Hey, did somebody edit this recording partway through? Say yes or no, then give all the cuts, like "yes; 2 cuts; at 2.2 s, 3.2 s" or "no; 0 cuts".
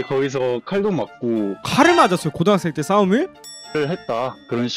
yes; 1 cut; at 3.4 s